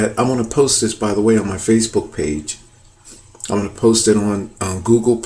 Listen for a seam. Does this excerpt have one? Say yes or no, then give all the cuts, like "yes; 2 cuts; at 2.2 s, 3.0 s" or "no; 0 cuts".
no; 0 cuts